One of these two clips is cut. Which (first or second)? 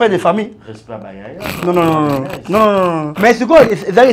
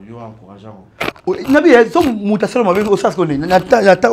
first